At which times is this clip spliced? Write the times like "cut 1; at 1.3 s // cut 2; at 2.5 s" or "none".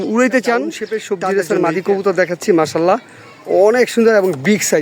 cut 1; at 1.0 s